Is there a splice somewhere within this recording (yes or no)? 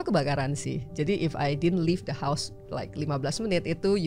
no